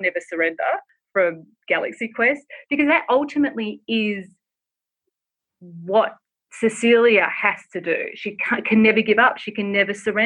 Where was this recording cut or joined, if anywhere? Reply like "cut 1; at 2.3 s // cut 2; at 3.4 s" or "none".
cut 1; at 1.0 s